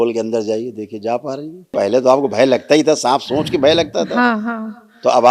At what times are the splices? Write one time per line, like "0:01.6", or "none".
0:01.7